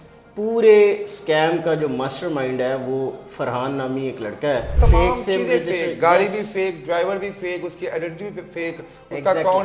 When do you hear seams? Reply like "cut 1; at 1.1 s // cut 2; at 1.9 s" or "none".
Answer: cut 1; at 4.8 s